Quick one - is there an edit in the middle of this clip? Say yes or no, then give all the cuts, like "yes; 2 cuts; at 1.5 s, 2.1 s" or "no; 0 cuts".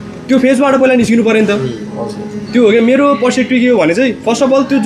no; 0 cuts